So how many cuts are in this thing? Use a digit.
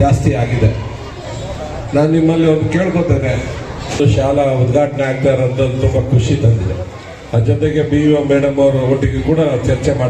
1